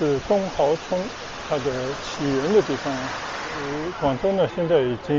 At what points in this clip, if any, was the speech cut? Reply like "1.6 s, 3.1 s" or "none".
3.8 s